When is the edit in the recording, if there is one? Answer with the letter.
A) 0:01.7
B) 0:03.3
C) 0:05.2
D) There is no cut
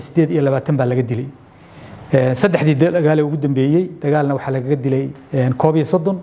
D